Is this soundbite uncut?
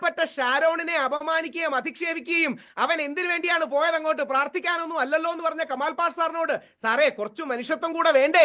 yes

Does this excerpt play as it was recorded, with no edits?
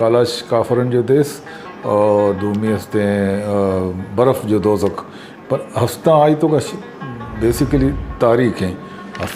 yes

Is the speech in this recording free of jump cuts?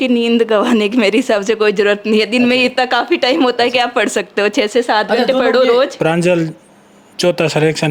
no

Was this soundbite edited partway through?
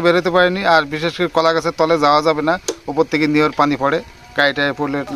no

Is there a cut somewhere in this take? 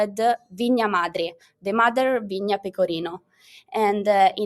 no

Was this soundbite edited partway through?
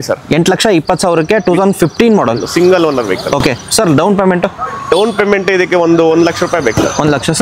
no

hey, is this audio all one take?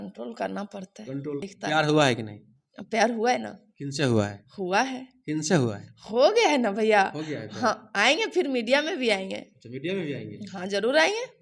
no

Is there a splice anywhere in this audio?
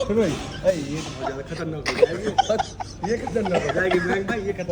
no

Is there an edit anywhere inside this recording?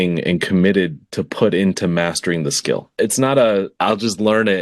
yes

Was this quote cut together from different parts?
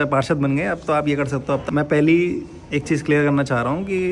yes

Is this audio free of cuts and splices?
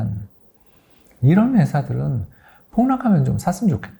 yes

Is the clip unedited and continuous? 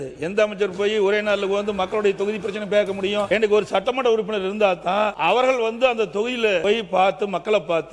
no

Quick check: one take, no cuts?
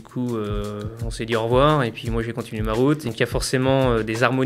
no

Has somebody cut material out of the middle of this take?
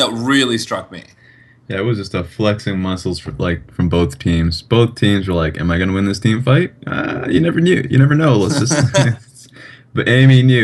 yes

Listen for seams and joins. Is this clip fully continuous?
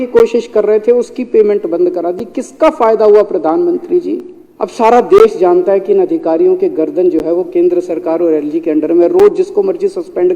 no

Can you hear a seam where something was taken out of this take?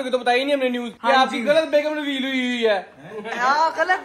no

